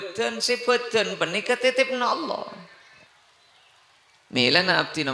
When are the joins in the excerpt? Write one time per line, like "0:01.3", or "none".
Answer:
0:03.1

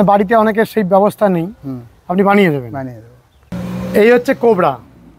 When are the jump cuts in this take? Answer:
0:03.6

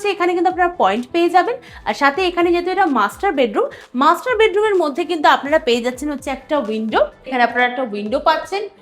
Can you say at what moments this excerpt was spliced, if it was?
0:07.3

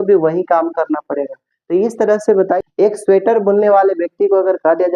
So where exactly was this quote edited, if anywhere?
0:02.6

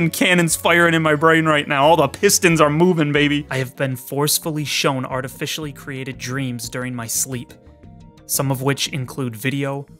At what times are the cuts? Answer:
0:03.6

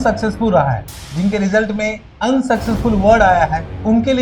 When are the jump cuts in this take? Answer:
0:02.0

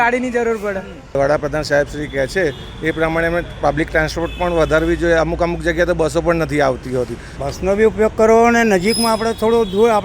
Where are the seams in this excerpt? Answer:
0:01.2
0:07.3

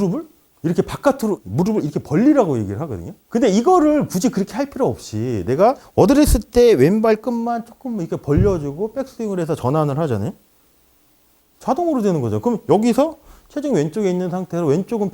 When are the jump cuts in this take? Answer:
0:01.4

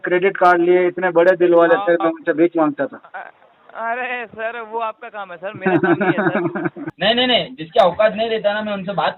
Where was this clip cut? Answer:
0:06.9

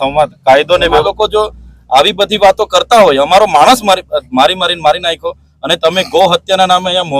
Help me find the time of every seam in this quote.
0:01.0

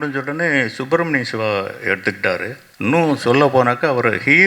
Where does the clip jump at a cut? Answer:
0:02.6

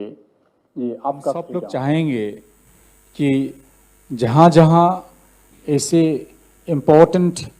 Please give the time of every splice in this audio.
0:01.4

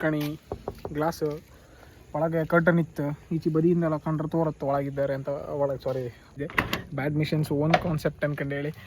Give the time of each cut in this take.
0:06.4

